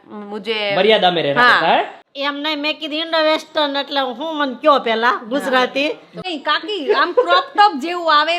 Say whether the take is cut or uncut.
cut